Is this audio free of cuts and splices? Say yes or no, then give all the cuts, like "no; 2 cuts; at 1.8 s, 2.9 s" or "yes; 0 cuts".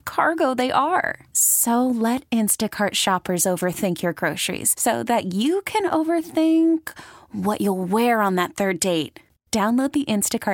yes; 0 cuts